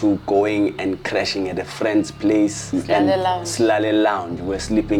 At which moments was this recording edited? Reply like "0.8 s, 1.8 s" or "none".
2.7 s